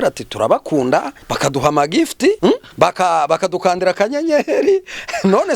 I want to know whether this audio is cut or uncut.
cut